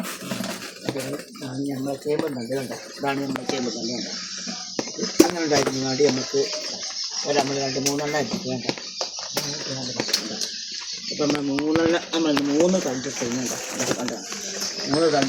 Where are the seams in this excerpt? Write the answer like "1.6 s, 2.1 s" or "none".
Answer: none